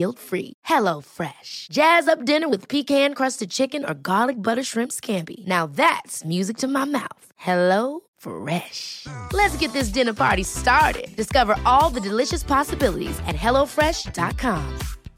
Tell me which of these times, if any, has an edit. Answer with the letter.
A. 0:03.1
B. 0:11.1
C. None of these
C